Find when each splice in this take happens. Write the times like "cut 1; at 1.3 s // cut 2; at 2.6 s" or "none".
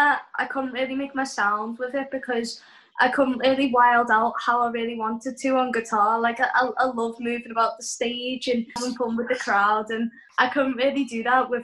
cut 1; at 8.8 s // cut 2; at 10.2 s

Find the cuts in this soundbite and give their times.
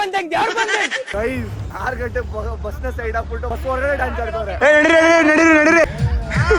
cut 1; at 1.1 s // cut 2; at 4.5 s // cut 3; at 5.8 s

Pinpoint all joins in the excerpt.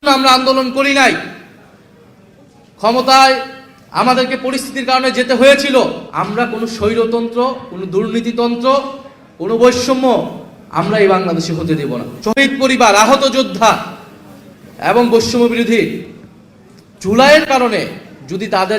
cut 1; at 6.1 s // cut 2; at 12.1 s

